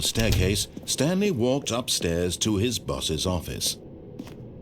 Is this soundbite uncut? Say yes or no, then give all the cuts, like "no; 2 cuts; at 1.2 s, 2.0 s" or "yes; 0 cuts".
yes; 0 cuts